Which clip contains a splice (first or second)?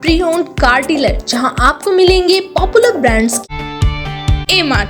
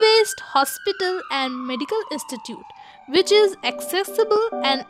first